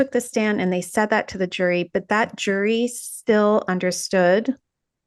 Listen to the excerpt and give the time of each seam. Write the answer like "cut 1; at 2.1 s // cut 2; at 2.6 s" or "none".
none